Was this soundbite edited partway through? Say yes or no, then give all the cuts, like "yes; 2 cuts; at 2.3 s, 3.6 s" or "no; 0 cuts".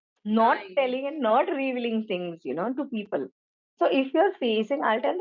no; 0 cuts